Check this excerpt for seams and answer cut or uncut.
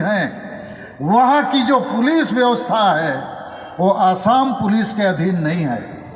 uncut